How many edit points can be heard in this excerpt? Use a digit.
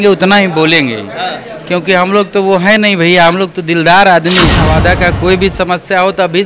1